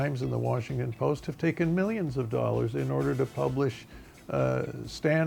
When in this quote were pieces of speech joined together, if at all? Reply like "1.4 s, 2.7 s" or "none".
none